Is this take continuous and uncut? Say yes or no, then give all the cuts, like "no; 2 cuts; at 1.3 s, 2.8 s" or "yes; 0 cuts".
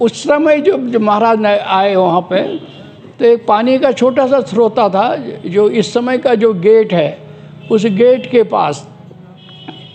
yes; 0 cuts